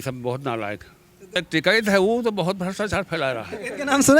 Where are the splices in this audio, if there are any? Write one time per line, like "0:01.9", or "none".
0:01.3